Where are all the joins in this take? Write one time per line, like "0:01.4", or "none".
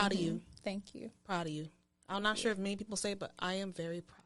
none